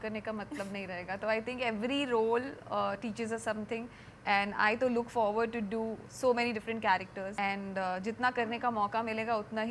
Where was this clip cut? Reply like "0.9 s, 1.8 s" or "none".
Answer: none